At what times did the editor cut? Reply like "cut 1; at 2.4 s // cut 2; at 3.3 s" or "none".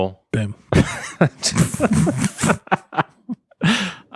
none